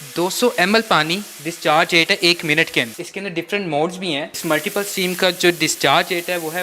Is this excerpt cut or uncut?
cut